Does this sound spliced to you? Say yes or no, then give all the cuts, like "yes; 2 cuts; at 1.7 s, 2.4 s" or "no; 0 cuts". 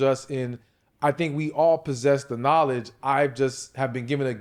no; 0 cuts